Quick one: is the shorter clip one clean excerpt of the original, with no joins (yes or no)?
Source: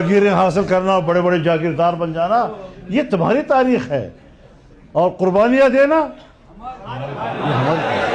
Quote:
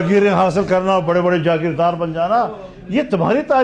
yes